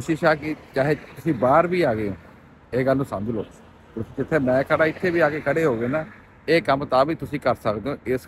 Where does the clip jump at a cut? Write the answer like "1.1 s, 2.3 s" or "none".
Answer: none